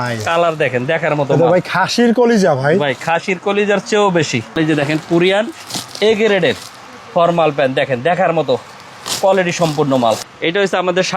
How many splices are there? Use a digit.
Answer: 2